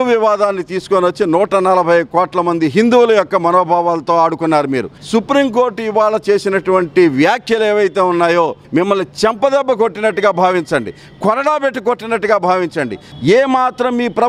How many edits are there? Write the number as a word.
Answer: three